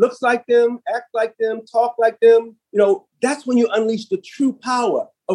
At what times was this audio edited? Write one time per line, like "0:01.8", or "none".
none

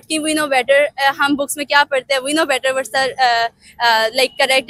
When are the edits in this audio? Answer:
none

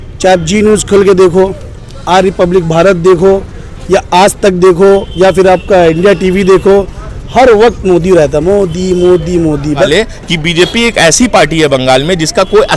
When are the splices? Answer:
0:09.9

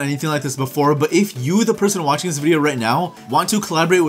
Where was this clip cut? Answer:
0:03.2

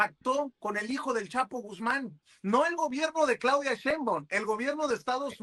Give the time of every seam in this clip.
none

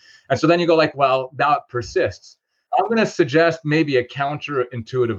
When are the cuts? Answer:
0:02.6

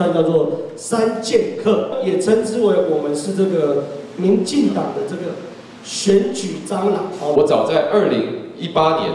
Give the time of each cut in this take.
0:01.9
0:07.3

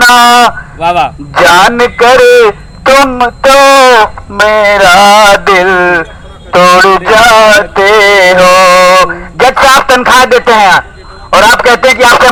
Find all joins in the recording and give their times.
none

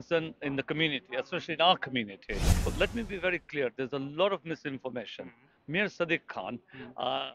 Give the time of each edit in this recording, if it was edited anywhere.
0:02.7

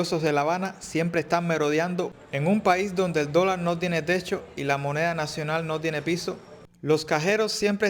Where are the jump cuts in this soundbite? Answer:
0:02.1
0:06.5

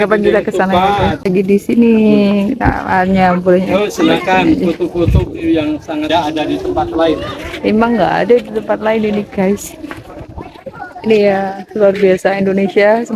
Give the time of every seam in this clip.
0:01.2

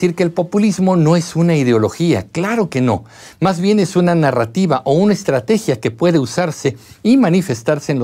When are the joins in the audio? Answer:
none

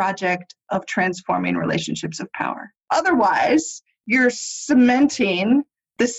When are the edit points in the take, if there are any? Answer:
0:02.7

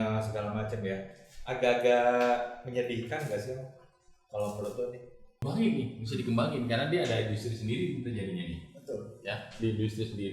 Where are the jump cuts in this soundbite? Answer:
0:05.3

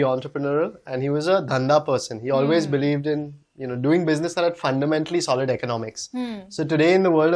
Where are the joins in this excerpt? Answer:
none

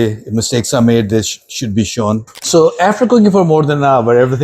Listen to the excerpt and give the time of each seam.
0:02.3

